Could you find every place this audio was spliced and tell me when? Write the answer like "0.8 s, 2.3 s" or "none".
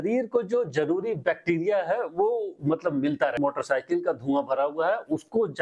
3.3 s